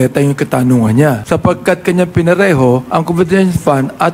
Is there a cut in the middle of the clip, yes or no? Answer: yes